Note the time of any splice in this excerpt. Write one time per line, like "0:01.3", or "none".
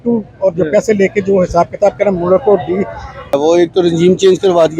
0:03.4